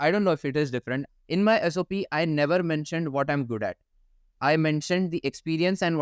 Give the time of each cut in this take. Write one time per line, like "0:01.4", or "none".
none